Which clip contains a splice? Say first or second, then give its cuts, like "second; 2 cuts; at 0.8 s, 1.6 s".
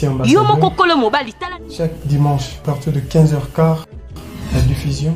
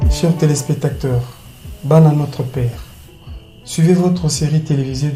first; 1 cut; at 1.3 s